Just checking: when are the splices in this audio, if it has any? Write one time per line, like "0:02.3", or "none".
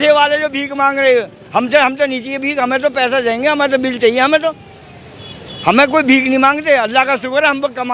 none